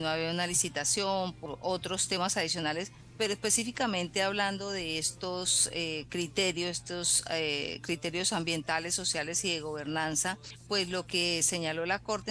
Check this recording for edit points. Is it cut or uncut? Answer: cut